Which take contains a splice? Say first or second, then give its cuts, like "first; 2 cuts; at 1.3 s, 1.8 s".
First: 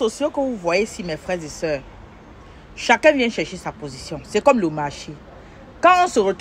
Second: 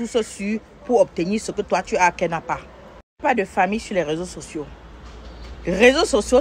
second; 1 cut; at 3.0 s